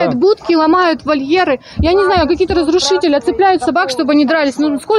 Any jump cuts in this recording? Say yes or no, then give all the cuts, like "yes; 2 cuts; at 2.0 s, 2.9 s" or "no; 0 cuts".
no; 0 cuts